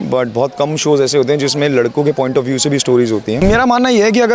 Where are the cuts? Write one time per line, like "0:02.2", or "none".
0:03.4